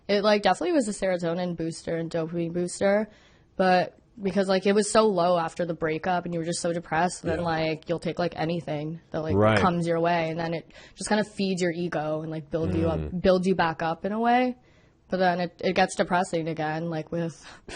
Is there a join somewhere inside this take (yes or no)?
no